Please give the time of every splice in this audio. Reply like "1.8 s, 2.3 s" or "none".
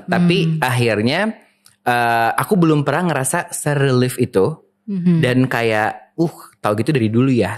none